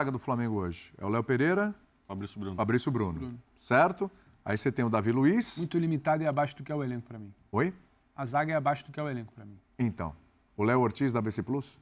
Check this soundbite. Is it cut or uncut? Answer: uncut